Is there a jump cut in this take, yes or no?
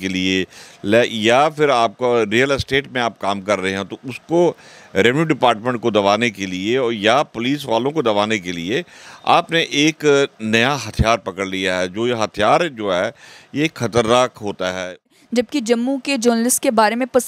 yes